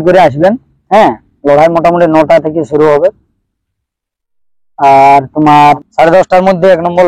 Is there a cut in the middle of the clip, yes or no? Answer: yes